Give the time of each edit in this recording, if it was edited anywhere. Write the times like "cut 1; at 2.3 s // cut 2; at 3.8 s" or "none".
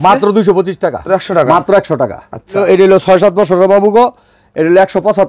cut 1; at 1.0 s // cut 2; at 2.6 s